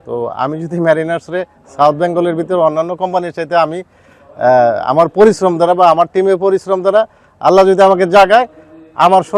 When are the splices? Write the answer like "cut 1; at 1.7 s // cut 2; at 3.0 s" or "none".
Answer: none